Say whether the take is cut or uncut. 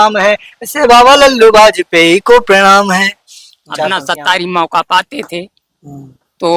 cut